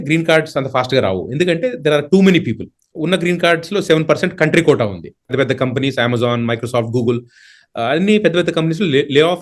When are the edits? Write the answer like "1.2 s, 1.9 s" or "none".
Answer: 5.3 s